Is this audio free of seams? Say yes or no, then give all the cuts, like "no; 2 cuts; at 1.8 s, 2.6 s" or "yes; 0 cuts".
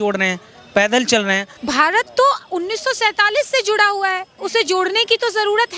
no; 1 cut; at 1.5 s